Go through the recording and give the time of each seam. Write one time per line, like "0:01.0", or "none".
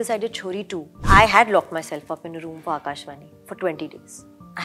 0:01.0